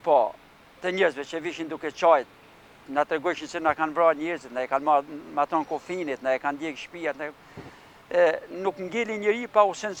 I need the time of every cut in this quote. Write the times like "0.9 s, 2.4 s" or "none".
none